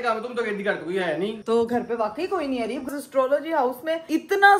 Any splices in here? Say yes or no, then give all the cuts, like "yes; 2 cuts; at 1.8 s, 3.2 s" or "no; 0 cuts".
yes; 2 cuts; at 1.4 s, 2.8 s